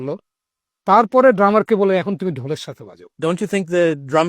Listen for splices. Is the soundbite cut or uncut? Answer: cut